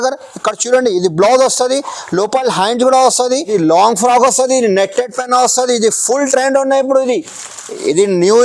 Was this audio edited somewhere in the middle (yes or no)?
yes